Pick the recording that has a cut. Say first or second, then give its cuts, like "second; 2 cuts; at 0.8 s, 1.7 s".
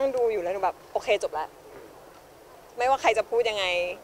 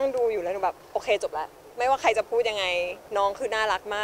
second; 2 cuts; at 1.6 s, 3.0 s